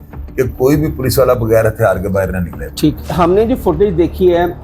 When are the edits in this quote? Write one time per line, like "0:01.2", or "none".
0:03.0

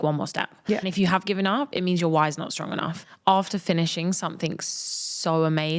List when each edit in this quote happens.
0:00.9
0:03.0

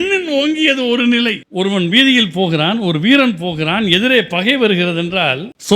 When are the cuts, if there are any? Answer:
0:01.4

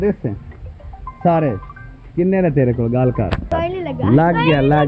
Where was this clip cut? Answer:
0:03.5

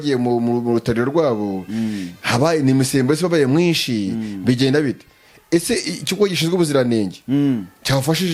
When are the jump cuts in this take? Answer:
none

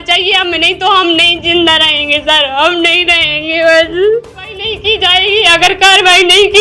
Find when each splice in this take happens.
0:04.8

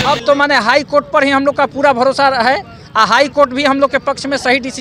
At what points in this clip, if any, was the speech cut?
none

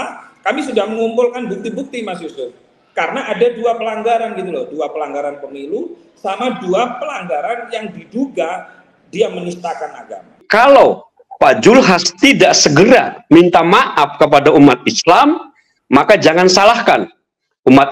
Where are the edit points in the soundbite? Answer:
0:10.4

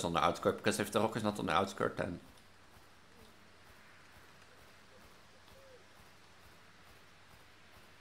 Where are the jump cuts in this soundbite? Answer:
none

